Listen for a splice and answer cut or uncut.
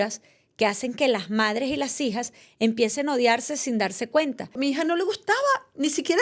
cut